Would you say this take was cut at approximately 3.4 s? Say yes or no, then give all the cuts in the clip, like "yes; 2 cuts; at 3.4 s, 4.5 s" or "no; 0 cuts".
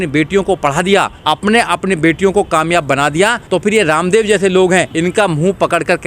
yes; 3 cuts; at 1.2 s, 3.4 s, 4.9 s